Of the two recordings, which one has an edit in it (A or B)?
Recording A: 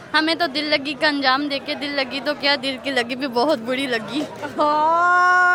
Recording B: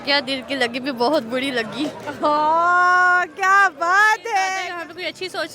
B